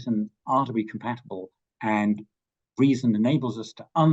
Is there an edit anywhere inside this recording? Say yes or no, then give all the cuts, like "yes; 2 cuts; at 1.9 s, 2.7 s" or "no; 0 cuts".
no; 0 cuts